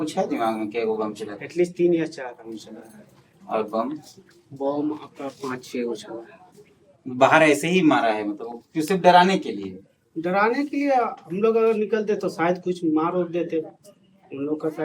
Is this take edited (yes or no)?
no